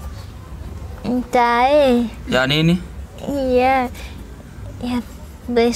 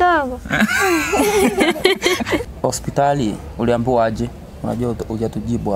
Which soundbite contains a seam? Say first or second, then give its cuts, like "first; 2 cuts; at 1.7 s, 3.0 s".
second; 1 cut; at 2.4 s